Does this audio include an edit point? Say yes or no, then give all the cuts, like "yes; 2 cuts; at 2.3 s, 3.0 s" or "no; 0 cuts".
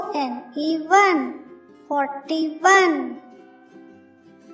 yes; 1 cut; at 3.3 s